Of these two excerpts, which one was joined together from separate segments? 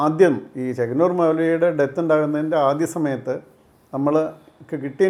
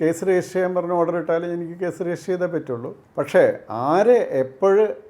second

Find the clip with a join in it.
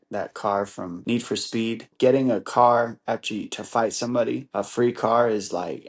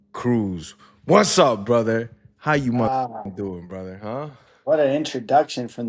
first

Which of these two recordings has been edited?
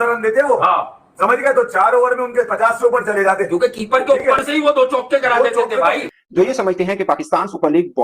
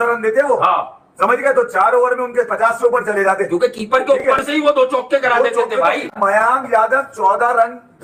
first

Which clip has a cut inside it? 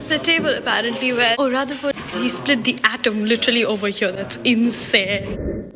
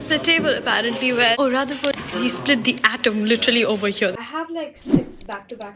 second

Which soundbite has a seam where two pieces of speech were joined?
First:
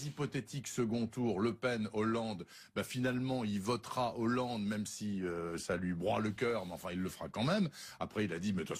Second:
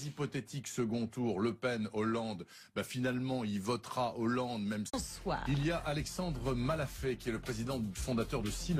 first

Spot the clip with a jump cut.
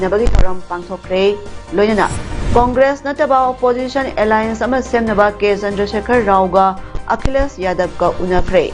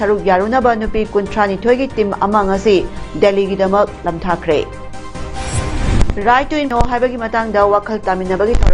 second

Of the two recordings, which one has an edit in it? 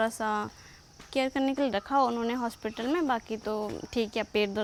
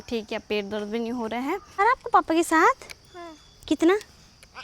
second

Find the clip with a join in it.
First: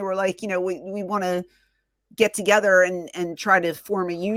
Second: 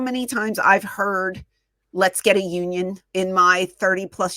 second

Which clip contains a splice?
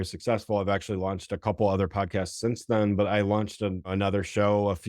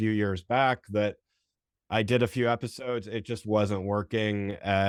first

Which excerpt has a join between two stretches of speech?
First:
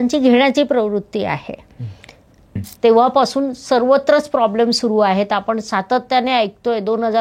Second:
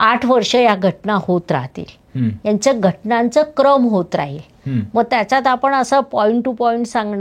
first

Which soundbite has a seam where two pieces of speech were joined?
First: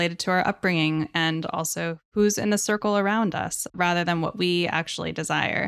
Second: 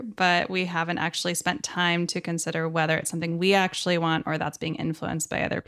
first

